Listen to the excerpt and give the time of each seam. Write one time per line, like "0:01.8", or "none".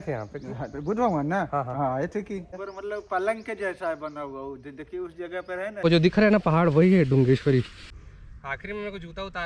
0:02.6
0:05.8
0:07.8

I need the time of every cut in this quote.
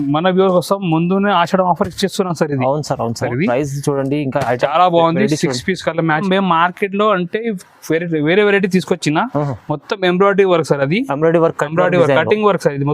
0:03.2
0:06.2

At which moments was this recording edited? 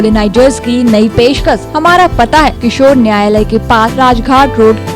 0:01.7
0:02.6
0:03.9

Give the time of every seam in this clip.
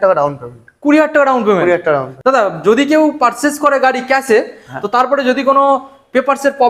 0:02.1

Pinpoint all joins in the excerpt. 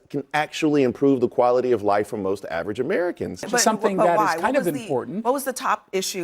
0:03.5

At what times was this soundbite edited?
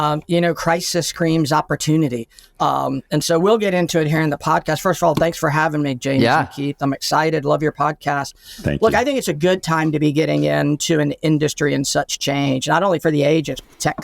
none

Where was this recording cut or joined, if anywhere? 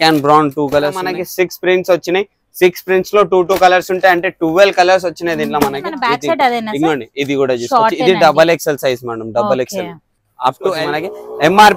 0:01.1
0:06.0
0:10.7

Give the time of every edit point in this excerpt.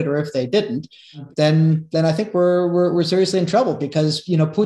0:01.2

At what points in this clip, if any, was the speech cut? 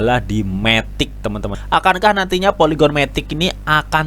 0:01.5

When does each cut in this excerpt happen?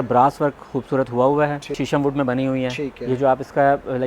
0:01.8

